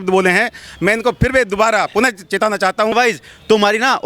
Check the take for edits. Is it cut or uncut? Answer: cut